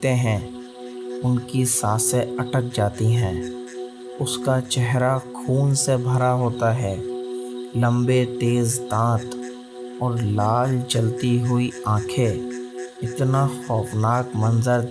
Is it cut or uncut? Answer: uncut